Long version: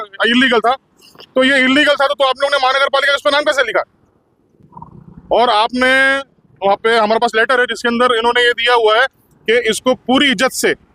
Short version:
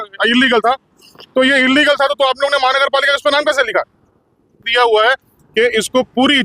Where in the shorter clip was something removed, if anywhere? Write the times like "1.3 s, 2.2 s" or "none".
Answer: 4.7 s